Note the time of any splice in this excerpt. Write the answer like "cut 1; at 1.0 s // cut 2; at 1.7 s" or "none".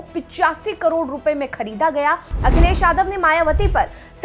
cut 1; at 2.3 s